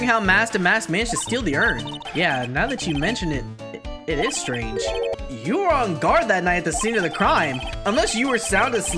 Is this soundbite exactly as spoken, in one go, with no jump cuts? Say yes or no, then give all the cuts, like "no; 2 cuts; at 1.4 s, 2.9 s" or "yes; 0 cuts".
no; 3 cuts; at 2.0 s, 5.2 s, 7.7 s